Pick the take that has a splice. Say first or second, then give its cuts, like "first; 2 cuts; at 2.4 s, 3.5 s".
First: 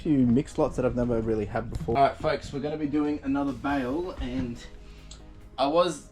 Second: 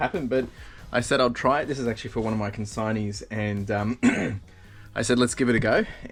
first; 1 cut; at 1.9 s